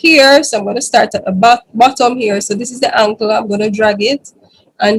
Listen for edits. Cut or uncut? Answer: uncut